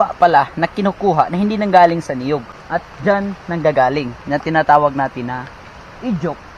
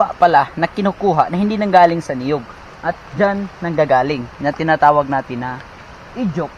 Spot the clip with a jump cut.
first; 1 cut; at 2.5 s

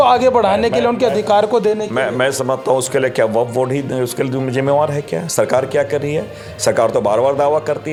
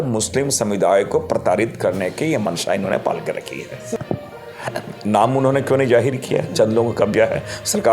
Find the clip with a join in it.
second; 1 cut; at 3.9 s

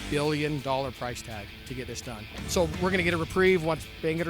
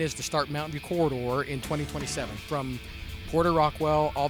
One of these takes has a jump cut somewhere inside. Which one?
first; 1 cut; at 2.3 s

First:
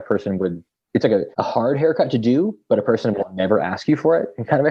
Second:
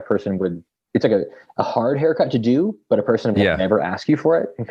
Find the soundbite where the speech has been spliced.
first; 1 cut; at 1.3 s

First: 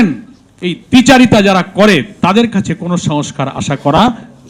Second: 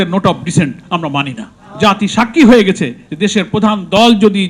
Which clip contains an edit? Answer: second; 1 cut; at 1.5 s

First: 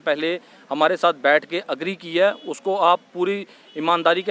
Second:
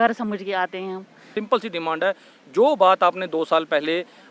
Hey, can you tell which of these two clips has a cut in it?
second; 1 cut; at 1.3 s

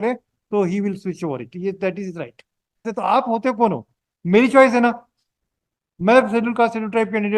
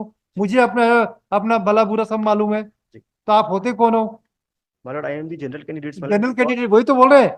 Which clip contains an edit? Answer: first; 1 cut; at 2.9 s

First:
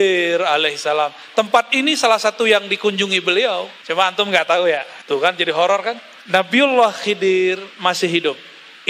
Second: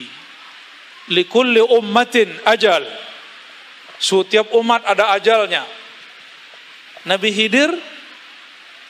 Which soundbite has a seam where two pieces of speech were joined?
first; 3 cuts; at 3.8 s, 4.9 s, 6.1 s

